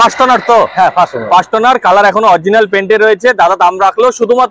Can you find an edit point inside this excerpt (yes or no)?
no